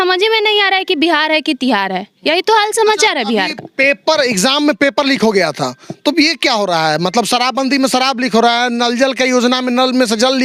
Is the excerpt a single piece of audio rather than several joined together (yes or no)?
yes